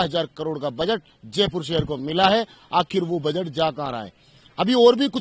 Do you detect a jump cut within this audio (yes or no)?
no